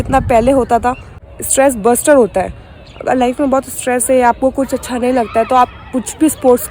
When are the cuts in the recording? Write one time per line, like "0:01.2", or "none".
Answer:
0:01.4